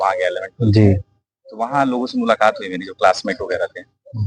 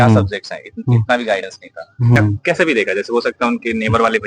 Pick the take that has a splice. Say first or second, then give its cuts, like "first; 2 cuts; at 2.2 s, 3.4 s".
second; 1 cut; at 2.2 s